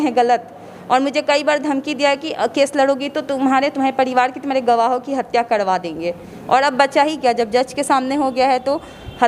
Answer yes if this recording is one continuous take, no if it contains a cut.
yes